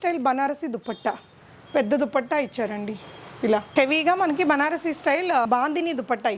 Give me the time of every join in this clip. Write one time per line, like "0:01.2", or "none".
0:03.7
0:05.5

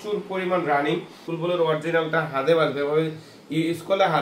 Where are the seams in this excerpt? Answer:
0:01.2

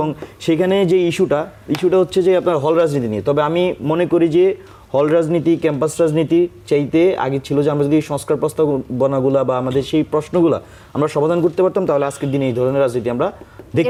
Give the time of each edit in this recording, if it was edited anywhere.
none

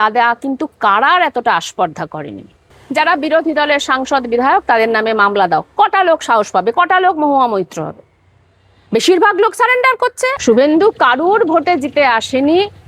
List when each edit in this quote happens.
0:02.7
0:10.4

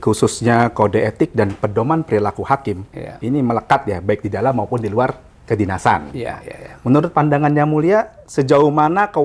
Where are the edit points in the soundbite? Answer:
none

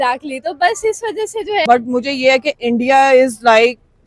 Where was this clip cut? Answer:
0:01.6

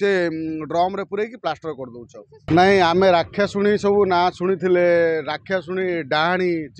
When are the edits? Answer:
0:02.4

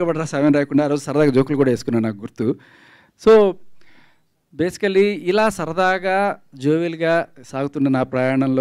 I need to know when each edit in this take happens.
none

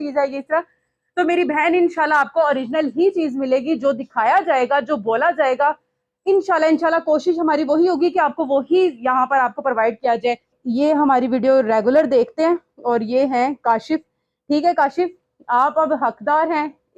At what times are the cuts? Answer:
0:10.6

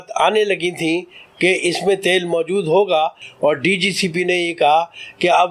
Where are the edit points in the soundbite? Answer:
0:03.2

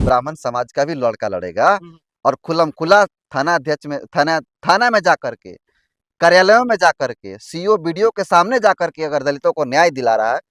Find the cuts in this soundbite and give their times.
none

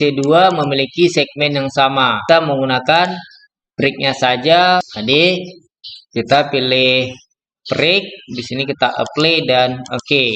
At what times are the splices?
0:02.2
0:04.9

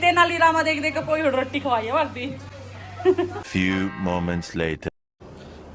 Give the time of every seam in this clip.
none

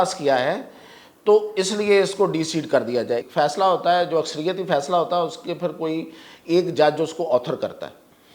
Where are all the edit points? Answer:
0:03.3

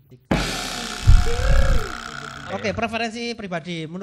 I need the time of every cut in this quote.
0:02.5

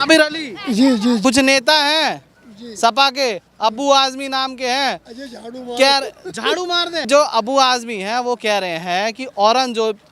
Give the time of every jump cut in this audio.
0:01.2
0:07.0

